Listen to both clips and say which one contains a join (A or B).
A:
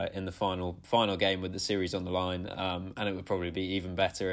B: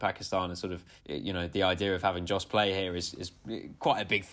B